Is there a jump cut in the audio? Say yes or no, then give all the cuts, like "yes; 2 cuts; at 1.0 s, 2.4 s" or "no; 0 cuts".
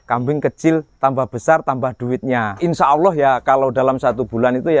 yes; 1 cut; at 2.6 s